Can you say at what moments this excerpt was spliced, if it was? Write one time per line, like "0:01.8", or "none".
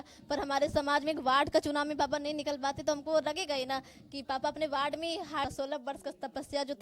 0:05.4